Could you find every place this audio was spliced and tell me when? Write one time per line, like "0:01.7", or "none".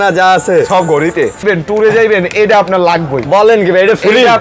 0:01.4